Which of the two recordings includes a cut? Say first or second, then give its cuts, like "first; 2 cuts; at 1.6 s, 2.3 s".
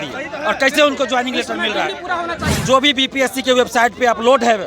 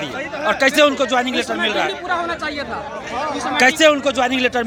first; 1 cut; at 2.5 s